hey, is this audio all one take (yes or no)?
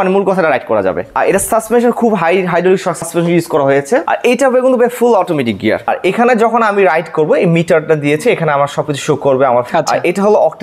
no